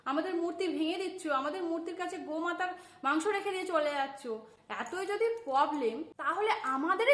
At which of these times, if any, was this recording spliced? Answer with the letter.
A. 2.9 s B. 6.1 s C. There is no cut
B